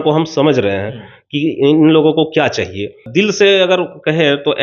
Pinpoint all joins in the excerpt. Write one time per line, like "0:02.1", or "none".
0:03.0

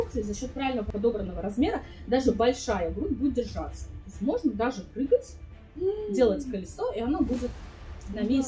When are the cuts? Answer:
none

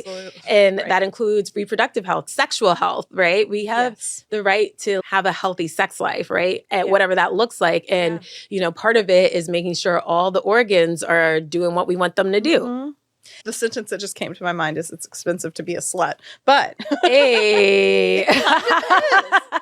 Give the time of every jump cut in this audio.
0:02.3
0:05.0
0:13.4

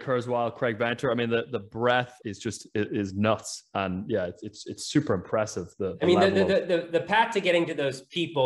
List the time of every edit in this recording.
0:02.2

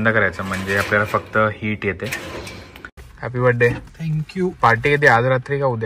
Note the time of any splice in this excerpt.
0:02.9

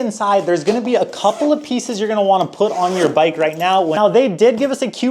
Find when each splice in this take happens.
0:03.9

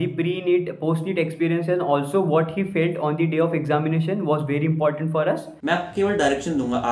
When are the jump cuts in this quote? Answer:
0:05.5

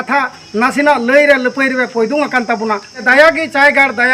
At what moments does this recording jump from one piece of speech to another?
0:03.0

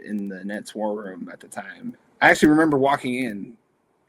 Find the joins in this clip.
0:02.1

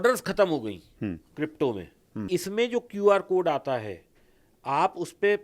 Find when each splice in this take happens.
0:02.2

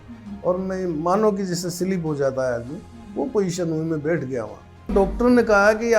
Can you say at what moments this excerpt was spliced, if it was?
0:04.9

